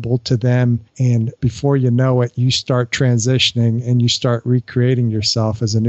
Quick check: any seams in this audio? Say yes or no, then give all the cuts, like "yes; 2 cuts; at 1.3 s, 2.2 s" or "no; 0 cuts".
yes; 1 cut; at 1.1 s